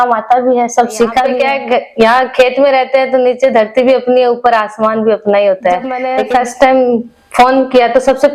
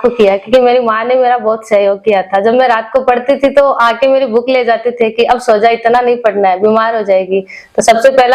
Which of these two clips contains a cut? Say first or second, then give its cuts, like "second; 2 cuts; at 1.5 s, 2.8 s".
first; 2 cuts; at 1.3 s, 6.0 s